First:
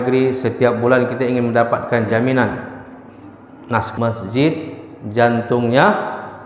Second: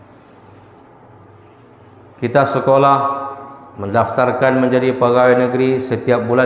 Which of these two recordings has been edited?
first; 1 cut; at 3.9 s

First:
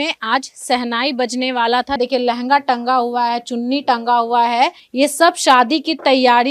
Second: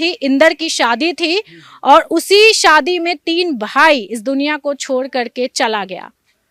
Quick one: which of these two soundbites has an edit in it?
first; 2 cuts; at 2.0 s, 4.8 s

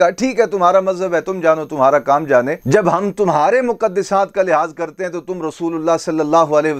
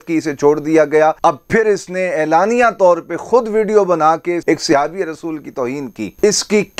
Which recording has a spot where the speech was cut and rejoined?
second; 2 cuts; at 1.2 s, 4.4 s

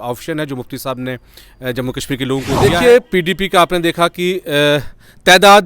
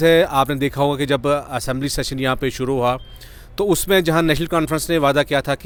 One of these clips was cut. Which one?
first; 1 cut; at 2.6 s

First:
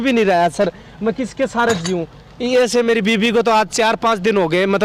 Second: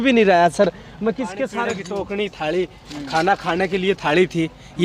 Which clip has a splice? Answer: second; 1 cut; at 1.7 s

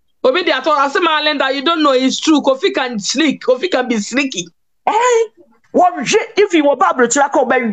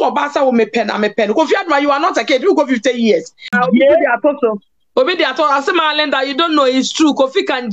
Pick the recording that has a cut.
second; 1 cut; at 3.4 s

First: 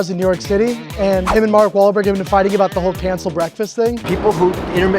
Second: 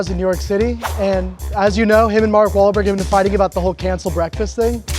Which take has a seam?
first; 2 cuts; at 1.3 s, 4.0 s

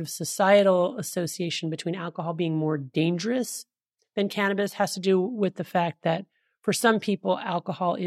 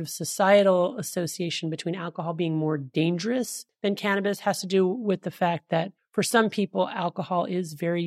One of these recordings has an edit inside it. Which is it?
second; 2 cuts; at 3.6 s, 6.0 s

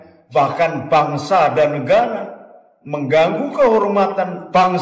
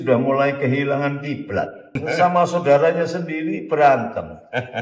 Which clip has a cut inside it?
second; 1 cut; at 1.9 s

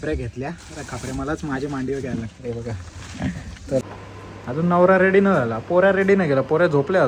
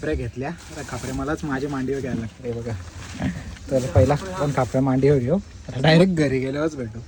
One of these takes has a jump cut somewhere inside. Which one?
first; 1 cut; at 3.8 s

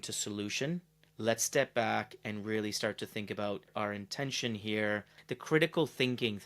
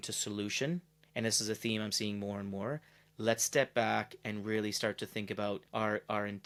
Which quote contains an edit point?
first; 3 cuts; at 1.0 s, 3.7 s, 5.2 s

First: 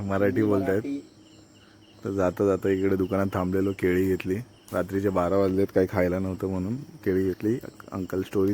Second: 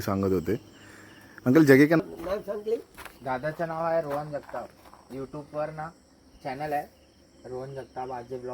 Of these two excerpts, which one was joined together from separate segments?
second; 1 cut; at 2.0 s

